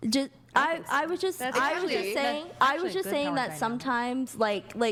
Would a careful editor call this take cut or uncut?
uncut